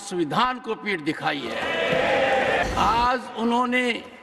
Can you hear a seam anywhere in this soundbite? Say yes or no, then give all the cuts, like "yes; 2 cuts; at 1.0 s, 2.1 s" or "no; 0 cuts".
yes; 1 cut; at 2.6 s